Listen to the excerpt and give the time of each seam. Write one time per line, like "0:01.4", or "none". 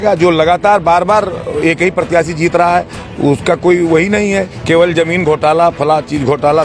none